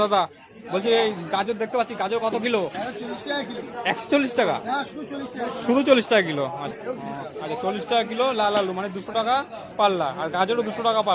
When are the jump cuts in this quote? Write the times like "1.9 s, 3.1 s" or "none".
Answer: 6.7 s